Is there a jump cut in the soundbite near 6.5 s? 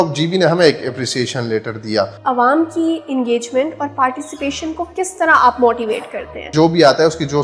yes; 2 cuts; at 2.2 s, 6.5 s

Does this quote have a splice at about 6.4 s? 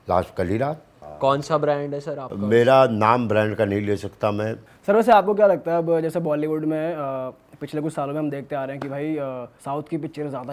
no; 3 cuts; at 1.0 s, 4.6 s, 9.5 s

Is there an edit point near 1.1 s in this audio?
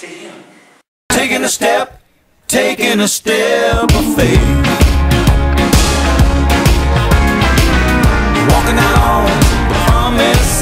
yes; 1 cut; at 1.1 s

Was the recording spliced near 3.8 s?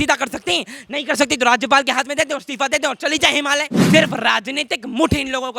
yes; 1 cut; at 3.8 s

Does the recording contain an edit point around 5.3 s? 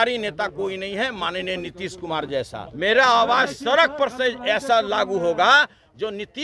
no; 1 cut; at 2.6 s

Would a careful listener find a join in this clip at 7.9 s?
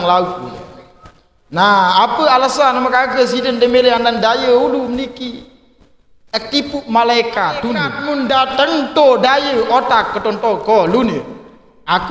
yes; 1 cut; at 7.9 s

